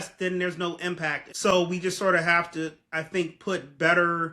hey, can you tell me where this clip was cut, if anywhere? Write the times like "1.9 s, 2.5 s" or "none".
1.2 s